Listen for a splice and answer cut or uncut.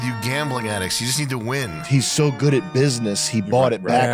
cut